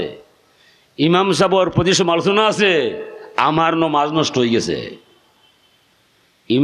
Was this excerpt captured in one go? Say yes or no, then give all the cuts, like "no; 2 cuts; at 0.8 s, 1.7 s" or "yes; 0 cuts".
yes; 0 cuts